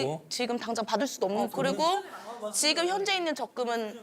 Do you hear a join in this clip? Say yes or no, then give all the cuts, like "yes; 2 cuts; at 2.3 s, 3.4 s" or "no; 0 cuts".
yes; 1 cut; at 1.5 s